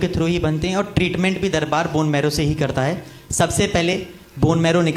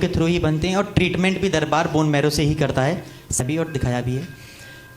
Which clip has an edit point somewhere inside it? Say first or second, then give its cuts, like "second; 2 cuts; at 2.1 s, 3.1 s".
second; 1 cut; at 3.4 s